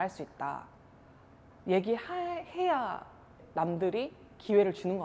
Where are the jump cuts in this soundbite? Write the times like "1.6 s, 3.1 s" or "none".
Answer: none